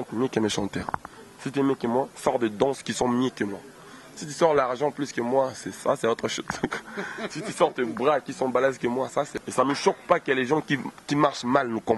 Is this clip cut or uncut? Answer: cut